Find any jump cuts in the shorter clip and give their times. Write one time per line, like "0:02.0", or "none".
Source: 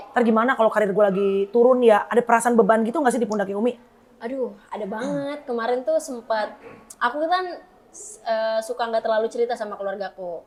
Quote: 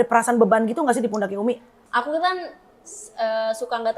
0:01.7

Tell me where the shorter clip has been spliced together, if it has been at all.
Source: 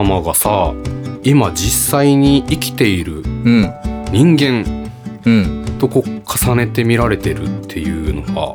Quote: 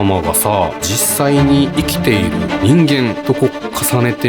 0:00.9
0:02.5
0:03.2

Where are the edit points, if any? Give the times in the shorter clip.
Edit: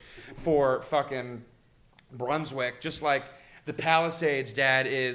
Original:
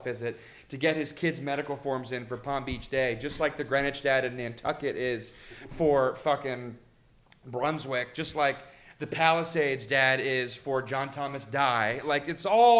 none

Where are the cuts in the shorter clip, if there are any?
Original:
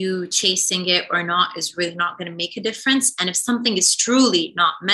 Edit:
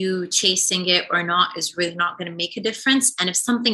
none

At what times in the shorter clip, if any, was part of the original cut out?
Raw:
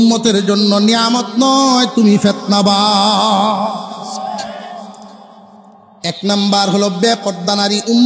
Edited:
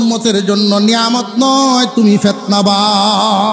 none

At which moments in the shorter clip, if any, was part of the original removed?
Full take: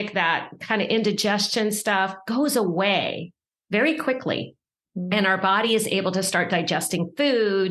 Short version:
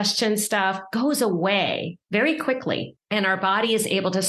0:01.9
0:03.0

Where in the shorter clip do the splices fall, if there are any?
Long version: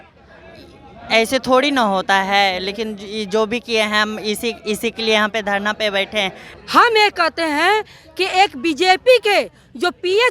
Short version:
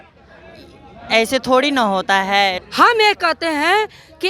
0:02.6

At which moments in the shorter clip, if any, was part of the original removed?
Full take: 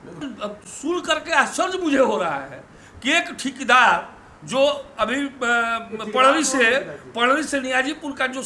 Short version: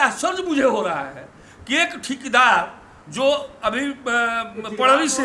none

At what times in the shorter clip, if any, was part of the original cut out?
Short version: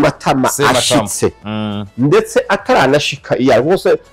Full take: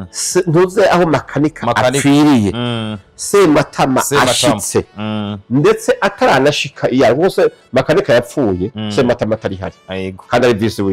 none

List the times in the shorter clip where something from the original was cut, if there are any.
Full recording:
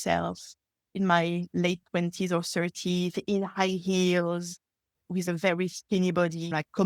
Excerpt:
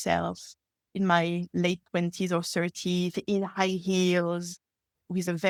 none

